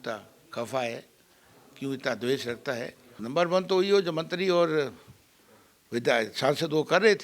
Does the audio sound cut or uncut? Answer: cut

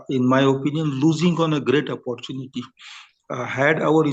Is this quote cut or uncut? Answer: uncut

